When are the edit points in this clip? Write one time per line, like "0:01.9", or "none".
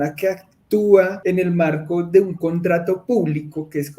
0:01.2